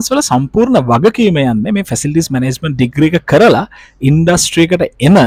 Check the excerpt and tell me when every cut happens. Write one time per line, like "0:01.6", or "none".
none